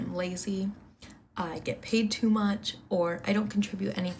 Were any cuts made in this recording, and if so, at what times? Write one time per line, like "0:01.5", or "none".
none